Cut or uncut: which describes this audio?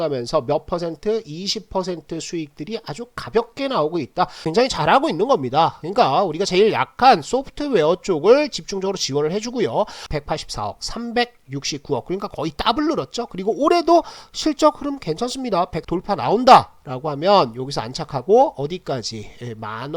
cut